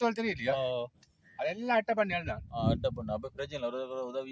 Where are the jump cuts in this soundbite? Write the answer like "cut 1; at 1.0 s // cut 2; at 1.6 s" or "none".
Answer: none